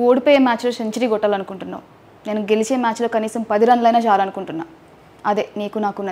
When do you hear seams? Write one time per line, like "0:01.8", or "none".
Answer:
none